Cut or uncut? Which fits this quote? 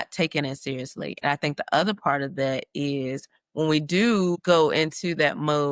uncut